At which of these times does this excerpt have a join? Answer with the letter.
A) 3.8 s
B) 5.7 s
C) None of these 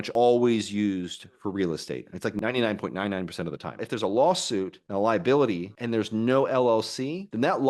A